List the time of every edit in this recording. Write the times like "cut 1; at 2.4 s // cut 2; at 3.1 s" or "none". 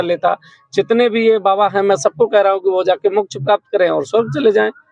none